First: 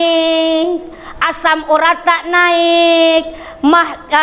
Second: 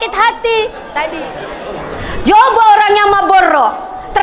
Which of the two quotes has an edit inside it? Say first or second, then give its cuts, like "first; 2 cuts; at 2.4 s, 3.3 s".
second; 1 cut; at 1.1 s